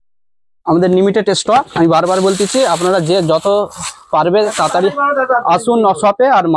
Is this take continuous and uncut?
yes; 0 cuts

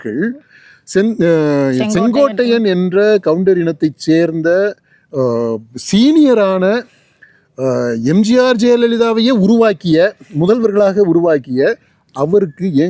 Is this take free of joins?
yes; 0 cuts

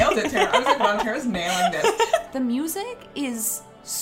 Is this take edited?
yes; 1 cut; at 2.3 s

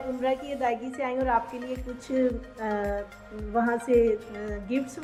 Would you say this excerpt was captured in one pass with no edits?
yes; 0 cuts

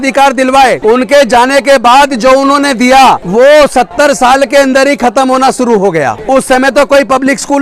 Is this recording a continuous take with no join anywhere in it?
no; 3 cuts; at 0.8 s, 3.2 s, 6.2 s

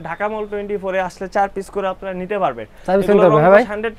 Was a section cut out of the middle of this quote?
no; 0 cuts

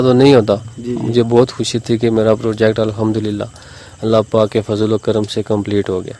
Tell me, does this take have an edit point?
no; 0 cuts

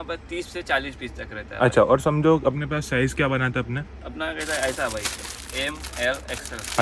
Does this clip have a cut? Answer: no; 0 cuts

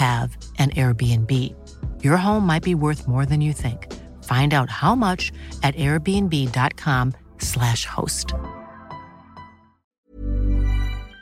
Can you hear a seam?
yes; 1 cut; at 9.8 s

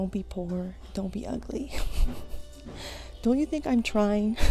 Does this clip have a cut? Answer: no; 0 cuts

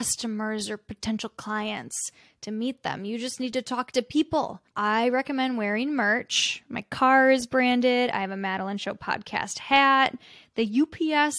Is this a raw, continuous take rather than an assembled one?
yes; 0 cuts

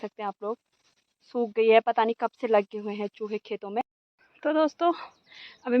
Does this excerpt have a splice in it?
yes; 1 cut; at 3.8 s

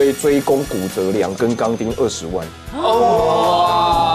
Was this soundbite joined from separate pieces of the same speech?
no; 0 cuts

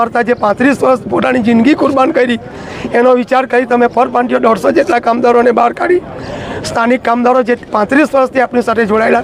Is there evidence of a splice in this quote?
no; 0 cuts

